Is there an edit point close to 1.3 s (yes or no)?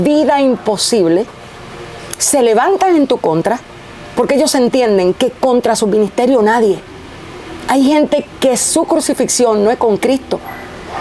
no